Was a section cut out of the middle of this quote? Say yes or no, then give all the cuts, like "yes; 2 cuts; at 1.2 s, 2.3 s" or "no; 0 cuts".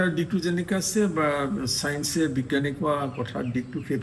no; 0 cuts